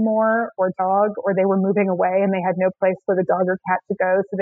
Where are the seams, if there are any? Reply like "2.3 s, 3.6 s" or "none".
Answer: none